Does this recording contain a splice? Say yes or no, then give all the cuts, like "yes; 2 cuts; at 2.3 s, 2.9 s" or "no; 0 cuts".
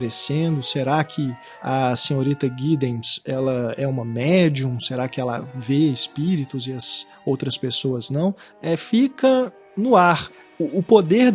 yes; 4 cuts; at 1.5 s, 8.5 s, 9.6 s, 10.3 s